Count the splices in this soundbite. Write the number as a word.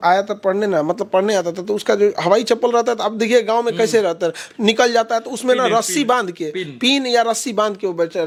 zero